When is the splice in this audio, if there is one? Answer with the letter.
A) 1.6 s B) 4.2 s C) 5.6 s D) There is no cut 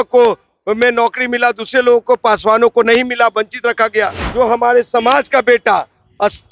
B